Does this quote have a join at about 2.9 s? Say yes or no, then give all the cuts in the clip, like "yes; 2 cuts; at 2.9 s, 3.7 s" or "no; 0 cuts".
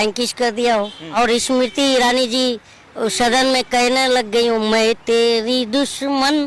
no; 1 cut; at 1.0 s